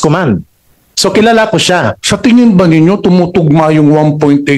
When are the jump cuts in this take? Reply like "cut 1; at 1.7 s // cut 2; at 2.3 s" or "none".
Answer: cut 1; at 2.0 s

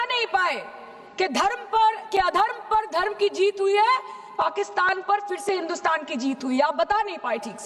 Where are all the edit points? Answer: none

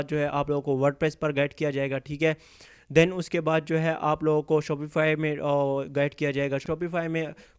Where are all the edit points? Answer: cut 1; at 6.6 s

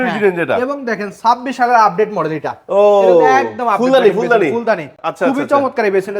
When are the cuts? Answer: none

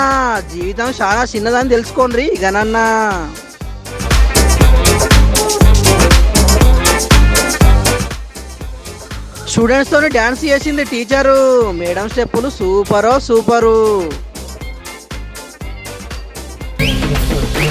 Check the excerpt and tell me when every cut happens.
cut 1; at 16.7 s

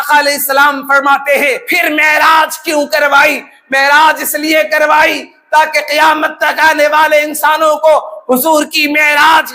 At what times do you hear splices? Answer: cut 1; at 1.7 s

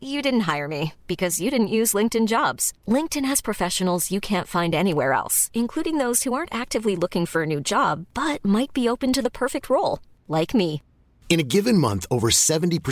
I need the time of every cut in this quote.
none

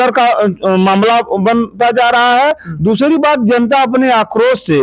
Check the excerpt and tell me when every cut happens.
none

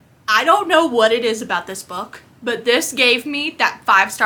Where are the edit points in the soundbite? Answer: none

